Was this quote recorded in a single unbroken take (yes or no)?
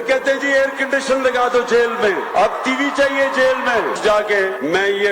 no